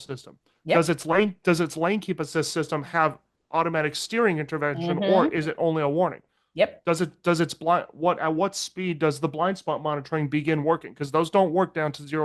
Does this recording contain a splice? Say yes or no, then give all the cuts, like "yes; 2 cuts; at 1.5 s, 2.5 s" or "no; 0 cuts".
no; 0 cuts